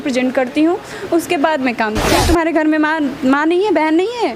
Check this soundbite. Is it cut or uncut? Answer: cut